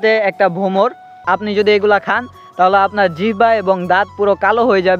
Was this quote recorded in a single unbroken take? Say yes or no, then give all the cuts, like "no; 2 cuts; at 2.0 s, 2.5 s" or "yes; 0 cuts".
no; 1 cut; at 1.1 s